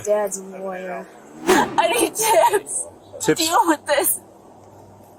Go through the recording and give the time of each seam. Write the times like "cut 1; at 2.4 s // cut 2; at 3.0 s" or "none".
cut 1; at 1.4 s